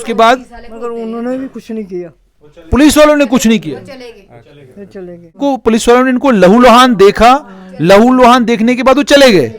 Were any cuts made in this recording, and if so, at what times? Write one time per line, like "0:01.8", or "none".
0:05.4